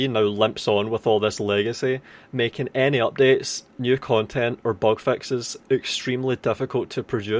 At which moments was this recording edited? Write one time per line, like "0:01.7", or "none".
none